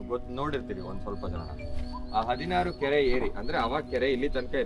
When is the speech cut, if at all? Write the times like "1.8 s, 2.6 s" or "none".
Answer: none